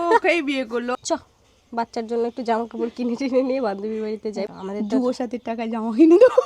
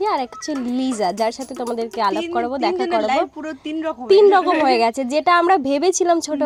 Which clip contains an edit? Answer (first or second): first